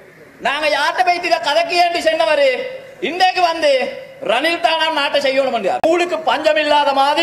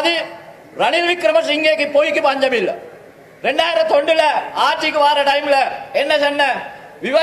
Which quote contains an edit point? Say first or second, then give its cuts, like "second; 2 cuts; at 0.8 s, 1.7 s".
first; 1 cut; at 5.8 s